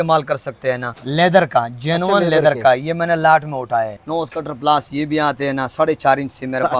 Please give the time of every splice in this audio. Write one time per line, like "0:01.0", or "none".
0:01.0
0:04.0